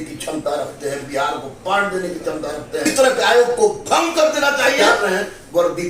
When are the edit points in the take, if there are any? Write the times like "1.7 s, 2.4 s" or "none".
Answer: 2.9 s, 4.9 s